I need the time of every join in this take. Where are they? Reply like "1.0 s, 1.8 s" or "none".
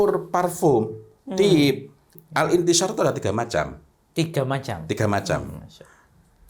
2.2 s